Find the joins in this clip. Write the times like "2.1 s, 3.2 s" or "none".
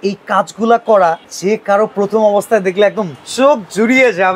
1.3 s